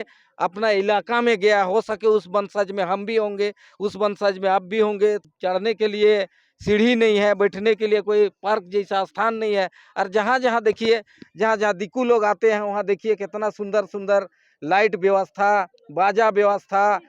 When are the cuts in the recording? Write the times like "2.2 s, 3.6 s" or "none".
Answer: 5.3 s